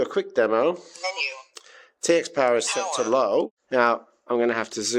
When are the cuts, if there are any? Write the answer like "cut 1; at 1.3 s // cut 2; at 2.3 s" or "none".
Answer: cut 1; at 3.6 s

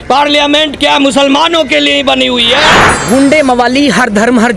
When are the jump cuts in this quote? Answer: cut 1; at 2.9 s

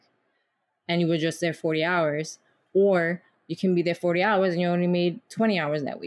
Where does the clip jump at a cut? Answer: none

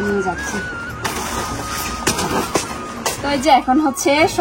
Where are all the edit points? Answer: cut 1; at 3.2 s

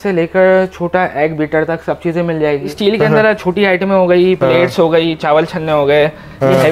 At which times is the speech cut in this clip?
cut 1; at 2.7 s

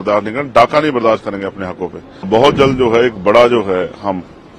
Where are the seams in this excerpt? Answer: cut 1; at 2.3 s

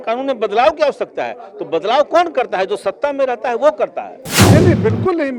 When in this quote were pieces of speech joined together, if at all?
cut 1; at 4.3 s

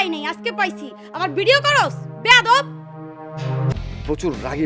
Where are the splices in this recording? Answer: cut 1; at 3.7 s

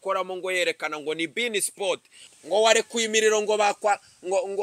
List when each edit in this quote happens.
cut 1; at 2.3 s

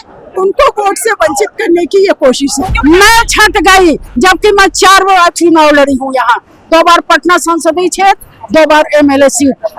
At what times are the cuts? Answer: cut 1; at 2.7 s

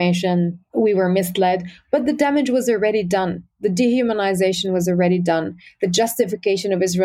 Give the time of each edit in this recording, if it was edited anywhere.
none

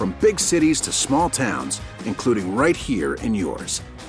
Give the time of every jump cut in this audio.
none

